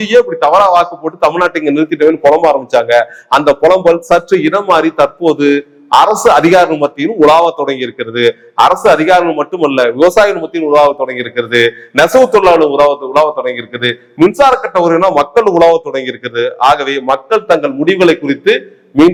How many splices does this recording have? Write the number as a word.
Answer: zero